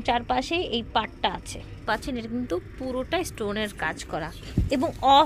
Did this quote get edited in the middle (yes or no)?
yes